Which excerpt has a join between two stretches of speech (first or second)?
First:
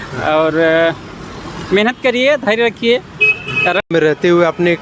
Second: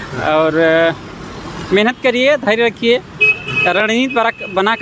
first